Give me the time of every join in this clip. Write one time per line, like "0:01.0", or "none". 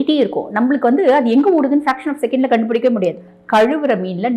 0:03.3